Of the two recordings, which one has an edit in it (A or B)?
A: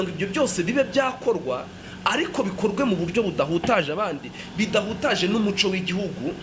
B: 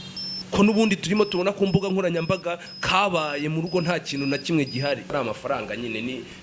B